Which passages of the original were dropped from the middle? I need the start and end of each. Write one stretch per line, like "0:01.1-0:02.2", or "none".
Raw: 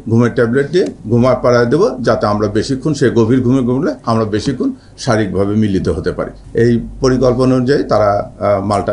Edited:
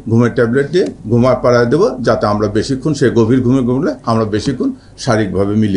none